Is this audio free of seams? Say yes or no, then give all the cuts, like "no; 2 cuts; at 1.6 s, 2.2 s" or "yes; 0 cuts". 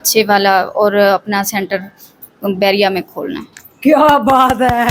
yes; 0 cuts